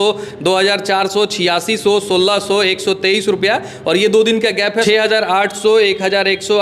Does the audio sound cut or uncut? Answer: cut